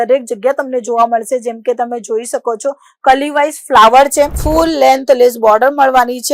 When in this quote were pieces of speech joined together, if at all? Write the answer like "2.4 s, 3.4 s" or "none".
4.4 s